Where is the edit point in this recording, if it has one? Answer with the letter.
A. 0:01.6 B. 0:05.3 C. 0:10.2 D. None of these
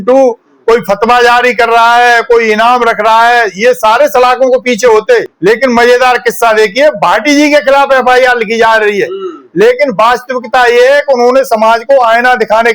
B